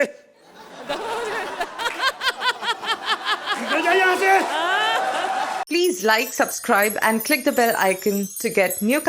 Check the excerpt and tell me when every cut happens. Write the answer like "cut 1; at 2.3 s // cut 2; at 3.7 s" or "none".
cut 1; at 5.6 s